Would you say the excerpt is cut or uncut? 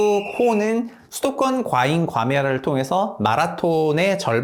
uncut